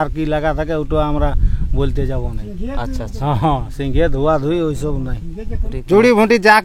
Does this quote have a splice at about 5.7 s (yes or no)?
yes